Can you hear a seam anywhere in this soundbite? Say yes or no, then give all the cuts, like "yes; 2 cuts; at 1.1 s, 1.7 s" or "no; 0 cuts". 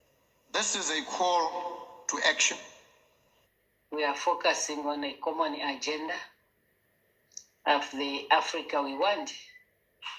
yes; 1 cut; at 3.9 s